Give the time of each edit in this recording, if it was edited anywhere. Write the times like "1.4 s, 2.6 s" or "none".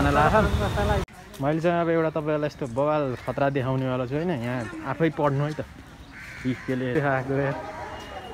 1.2 s, 6.9 s